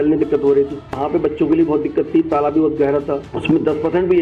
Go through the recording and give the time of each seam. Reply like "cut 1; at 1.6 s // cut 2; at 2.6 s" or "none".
cut 1; at 1.0 s // cut 2; at 3.2 s